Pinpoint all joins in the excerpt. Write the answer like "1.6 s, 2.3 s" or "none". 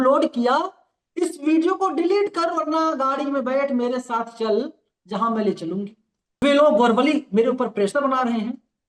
6.4 s